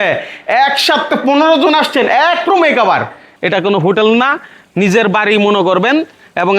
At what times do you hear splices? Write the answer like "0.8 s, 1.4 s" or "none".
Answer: 3.3 s